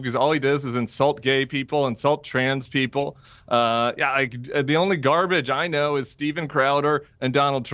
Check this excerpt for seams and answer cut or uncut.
uncut